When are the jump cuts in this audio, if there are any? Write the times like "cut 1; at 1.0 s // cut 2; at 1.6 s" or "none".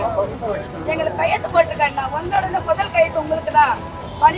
none